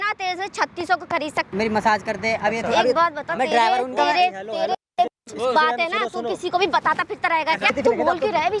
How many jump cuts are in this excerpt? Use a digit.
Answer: 2